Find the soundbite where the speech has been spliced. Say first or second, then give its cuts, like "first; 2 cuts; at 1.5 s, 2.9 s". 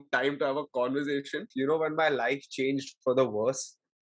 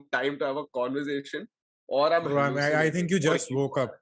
first; 1 cut; at 1.5 s